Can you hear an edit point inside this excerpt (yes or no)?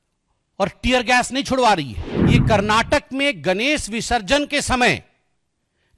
yes